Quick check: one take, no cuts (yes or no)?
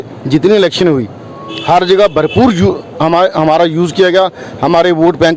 yes